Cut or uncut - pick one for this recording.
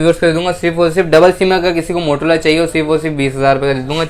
uncut